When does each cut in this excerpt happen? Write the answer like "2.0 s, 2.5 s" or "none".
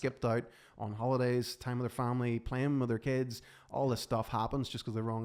none